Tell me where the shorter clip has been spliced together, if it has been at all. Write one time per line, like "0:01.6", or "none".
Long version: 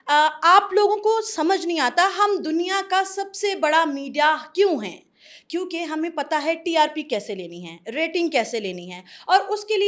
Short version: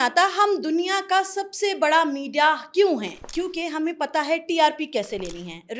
0:03.2